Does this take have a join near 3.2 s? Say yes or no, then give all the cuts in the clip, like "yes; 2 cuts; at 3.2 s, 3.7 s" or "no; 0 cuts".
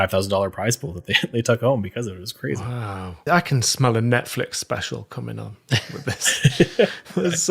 yes; 1 cut; at 3.2 s